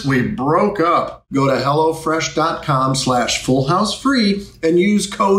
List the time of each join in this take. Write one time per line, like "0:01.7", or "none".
0:01.2